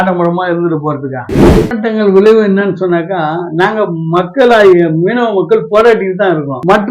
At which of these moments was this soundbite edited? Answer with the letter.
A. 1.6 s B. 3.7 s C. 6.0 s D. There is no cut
A